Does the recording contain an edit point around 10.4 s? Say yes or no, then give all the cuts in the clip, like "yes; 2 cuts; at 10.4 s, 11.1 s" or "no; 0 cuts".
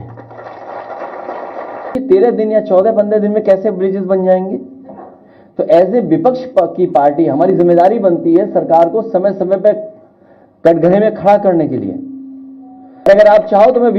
no; 2 cuts; at 1.9 s, 13.1 s